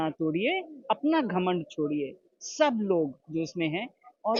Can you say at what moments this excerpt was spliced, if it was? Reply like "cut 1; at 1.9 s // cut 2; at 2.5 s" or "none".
none